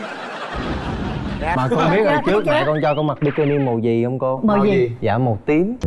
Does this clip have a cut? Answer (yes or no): yes